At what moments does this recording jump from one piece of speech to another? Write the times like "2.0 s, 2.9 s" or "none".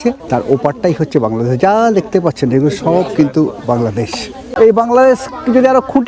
none